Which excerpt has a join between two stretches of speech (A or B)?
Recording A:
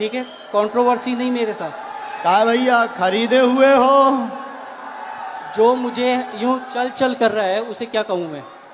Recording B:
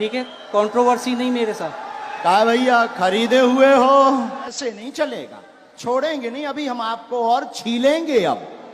B